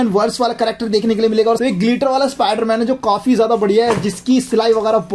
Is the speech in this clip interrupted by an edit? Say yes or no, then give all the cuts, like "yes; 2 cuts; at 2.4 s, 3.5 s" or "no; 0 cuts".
yes; 1 cut; at 1.6 s